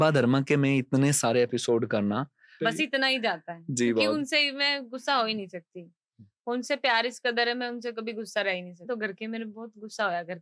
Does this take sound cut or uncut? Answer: cut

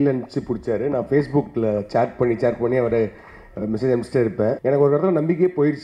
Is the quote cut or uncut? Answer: cut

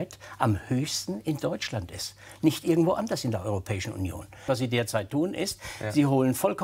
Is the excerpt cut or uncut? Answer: cut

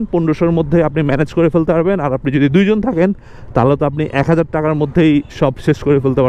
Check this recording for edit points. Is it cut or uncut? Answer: uncut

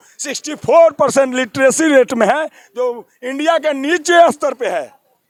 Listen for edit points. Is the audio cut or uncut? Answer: uncut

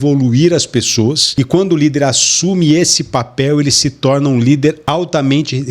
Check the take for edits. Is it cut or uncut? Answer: cut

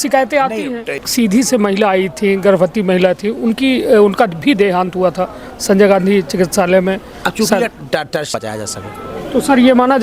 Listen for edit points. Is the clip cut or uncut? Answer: cut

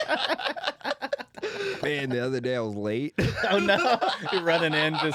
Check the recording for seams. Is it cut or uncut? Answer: cut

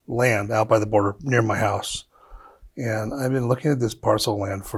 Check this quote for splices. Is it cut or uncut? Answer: uncut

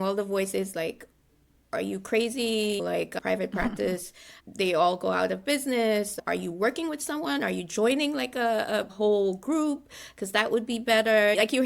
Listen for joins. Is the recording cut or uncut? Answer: uncut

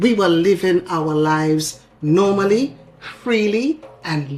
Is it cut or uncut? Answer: uncut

